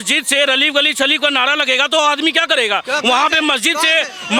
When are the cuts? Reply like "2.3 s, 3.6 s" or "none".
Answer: none

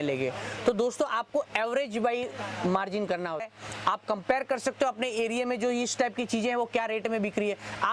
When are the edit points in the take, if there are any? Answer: 3.4 s

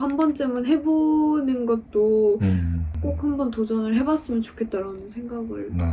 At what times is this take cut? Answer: none

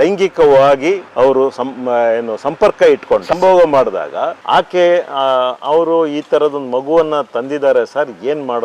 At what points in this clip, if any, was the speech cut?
4.4 s

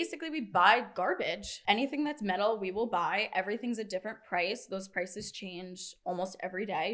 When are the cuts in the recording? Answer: 1.5 s

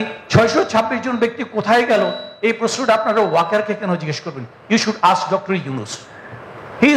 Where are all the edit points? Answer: none

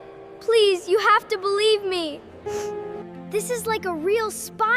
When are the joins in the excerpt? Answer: 2.9 s

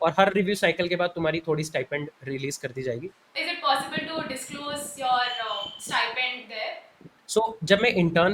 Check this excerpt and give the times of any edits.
3.3 s

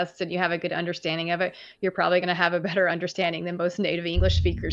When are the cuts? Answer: none

